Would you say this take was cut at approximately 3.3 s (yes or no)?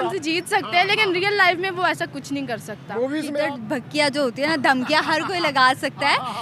yes